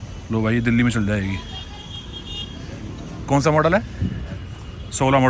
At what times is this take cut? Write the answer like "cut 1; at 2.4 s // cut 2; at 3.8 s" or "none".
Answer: none